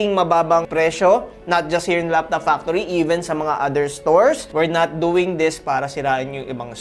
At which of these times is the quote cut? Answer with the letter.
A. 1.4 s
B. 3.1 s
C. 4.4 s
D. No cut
C